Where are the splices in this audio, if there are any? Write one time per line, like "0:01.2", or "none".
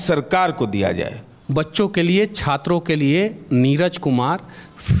0:01.3